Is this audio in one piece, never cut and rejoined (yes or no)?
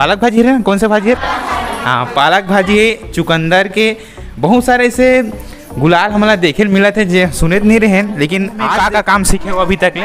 no